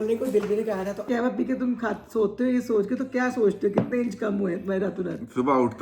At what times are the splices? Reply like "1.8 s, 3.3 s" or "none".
1.0 s